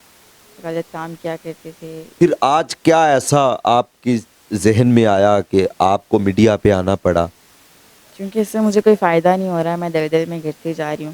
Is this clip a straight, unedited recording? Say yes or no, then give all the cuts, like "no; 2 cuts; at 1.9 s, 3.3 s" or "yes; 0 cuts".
no; 1 cut; at 2.1 s